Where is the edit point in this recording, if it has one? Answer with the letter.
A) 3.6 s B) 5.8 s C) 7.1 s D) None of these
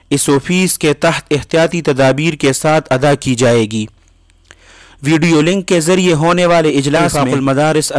C